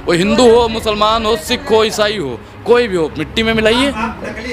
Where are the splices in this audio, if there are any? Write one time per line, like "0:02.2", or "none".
none